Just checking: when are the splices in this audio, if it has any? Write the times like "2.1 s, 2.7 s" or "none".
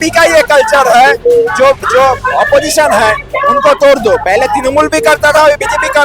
none